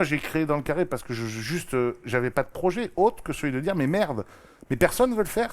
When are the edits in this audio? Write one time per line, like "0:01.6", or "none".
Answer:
0:02.0